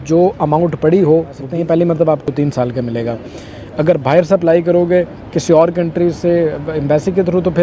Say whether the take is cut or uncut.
cut